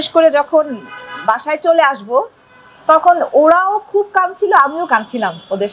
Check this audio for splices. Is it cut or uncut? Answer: uncut